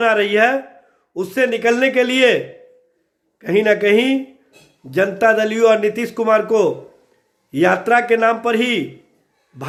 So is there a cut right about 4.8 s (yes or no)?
no